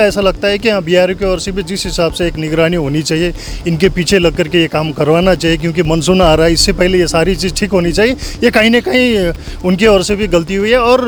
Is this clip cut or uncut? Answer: uncut